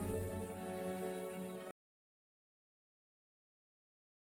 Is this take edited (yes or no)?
no